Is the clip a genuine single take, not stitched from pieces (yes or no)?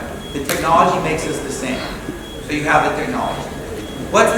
yes